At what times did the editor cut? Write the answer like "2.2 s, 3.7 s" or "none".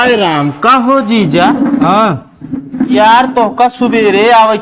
none